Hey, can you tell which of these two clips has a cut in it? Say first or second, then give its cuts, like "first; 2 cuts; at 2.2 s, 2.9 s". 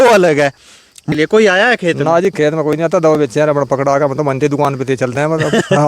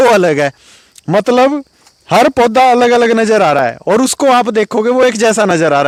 first; 1 cut; at 1.1 s